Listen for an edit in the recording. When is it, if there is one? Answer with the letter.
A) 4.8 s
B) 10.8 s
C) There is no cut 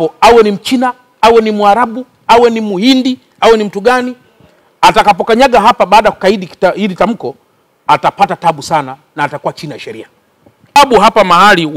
B